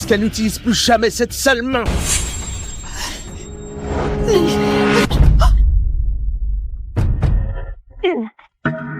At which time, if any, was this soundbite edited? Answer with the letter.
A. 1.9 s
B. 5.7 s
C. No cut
A